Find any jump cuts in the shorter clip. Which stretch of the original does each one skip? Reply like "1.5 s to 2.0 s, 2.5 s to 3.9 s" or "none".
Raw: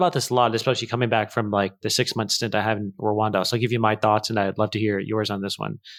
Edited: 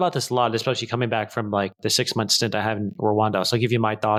none